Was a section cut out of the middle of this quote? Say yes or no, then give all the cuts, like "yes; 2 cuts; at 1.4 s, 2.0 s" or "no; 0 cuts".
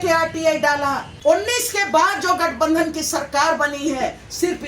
yes; 1 cut; at 1.1 s